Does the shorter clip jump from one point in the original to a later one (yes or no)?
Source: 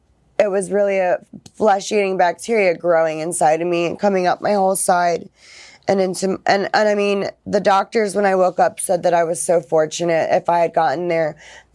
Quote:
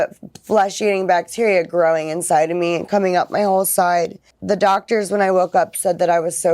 yes